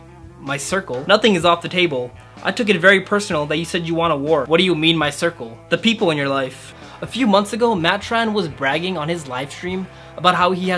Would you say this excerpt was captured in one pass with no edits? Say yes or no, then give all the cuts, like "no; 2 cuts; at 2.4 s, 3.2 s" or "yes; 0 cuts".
no; 2 cuts; at 4.5 s, 6.7 s